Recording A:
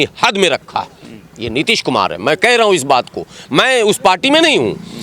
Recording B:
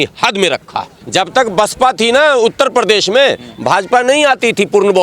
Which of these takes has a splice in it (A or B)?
B